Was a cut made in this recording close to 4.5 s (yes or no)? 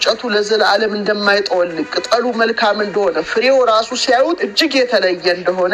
yes